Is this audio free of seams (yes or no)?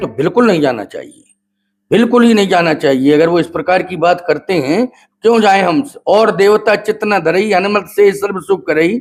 yes